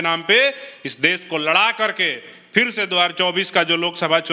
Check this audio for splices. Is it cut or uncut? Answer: uncut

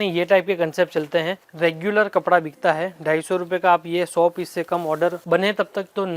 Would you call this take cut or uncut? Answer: cut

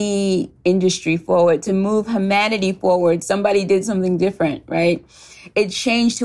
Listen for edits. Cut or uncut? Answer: cut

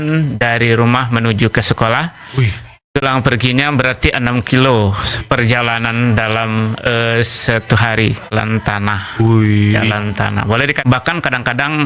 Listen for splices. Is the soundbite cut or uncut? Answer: cut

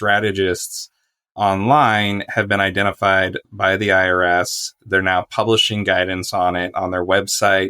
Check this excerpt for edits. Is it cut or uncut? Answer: cut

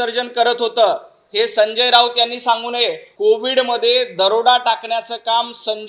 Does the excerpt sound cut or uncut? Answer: cut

